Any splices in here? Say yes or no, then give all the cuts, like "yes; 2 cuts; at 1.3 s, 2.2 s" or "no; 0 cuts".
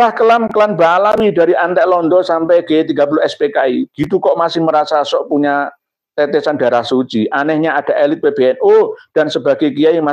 no; 0 cuts